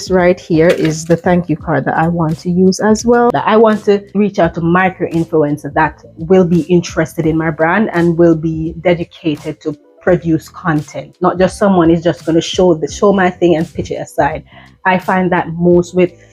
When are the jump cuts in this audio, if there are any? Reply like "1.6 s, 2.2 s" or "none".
3.2 s, 4.2 s